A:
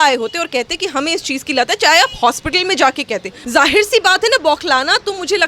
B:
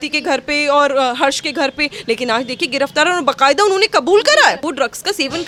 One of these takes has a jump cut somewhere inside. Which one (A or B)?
A